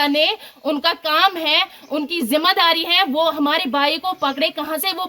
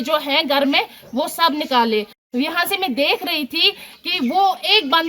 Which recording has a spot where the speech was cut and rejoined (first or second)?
second